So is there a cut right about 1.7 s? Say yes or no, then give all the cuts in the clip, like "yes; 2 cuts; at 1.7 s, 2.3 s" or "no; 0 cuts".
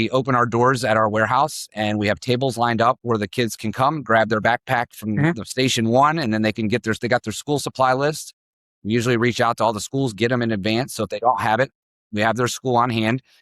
no; 0 cuts